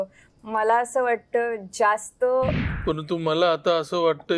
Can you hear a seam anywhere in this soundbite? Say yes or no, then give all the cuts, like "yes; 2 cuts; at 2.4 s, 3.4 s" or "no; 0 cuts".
yes; 1 cut; at 2.7 s